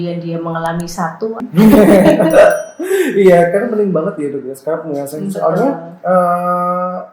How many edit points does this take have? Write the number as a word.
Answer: one